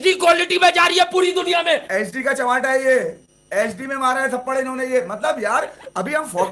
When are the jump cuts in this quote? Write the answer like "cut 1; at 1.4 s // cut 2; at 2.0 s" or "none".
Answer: none